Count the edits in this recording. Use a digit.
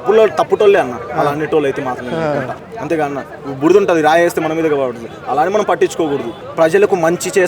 2